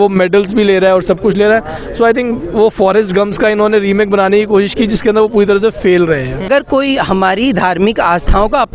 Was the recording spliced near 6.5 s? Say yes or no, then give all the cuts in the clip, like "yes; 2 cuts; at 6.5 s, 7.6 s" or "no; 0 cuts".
yes; 1 cut; at 6.5 s